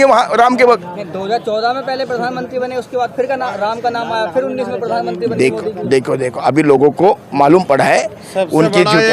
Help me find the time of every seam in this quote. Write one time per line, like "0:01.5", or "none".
none